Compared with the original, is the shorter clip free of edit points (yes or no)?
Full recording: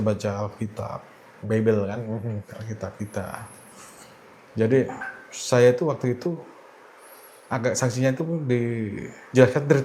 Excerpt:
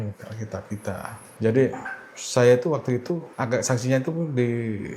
no